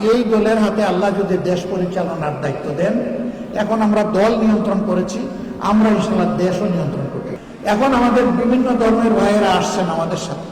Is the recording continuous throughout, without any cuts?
no; 1 cut; at 7.4 s

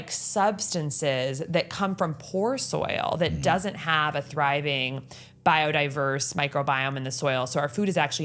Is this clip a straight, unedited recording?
yes; 0 cuts

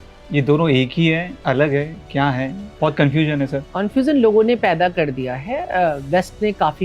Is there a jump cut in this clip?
yes; 2 cuts; at 2.6 s, 3.6 s

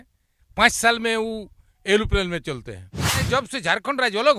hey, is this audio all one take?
no; 1 cut; at 3.1 s

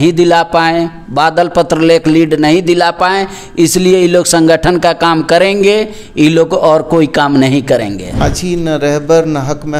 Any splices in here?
yes; 1 cut; at 8.2 s

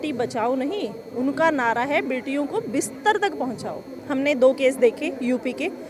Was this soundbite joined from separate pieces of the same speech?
yes; 1 cut; at 3.9 s

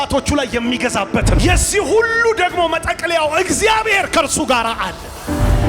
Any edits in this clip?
yes; 1 cut; at 1.4 s

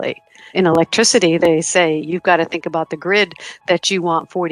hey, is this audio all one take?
yes; 0 cuts

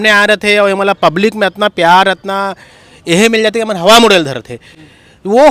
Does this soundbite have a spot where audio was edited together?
no; 0 cuts

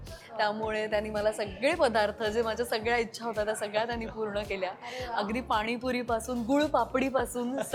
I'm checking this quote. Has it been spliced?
no; 0 cuts

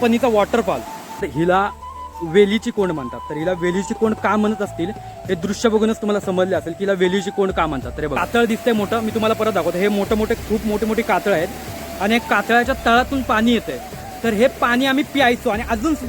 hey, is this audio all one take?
no; 2 cuts; at 1.2 s, 8.2 s

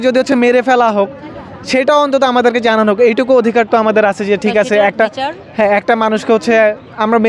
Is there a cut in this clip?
no; 0 cuts

